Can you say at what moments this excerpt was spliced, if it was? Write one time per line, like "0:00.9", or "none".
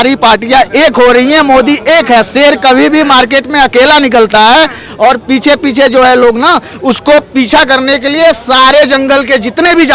none